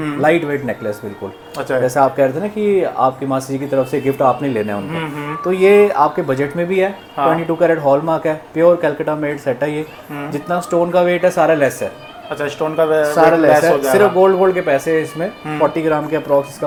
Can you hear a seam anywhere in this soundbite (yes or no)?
no